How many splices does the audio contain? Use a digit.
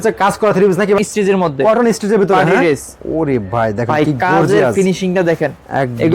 1